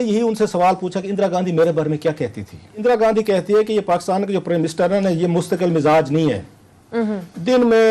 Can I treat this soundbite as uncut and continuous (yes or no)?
no